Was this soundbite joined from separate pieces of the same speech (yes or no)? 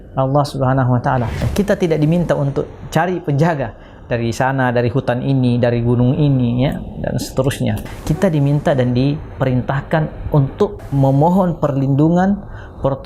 yes